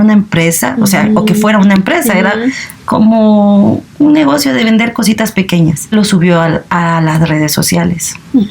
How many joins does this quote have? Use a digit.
1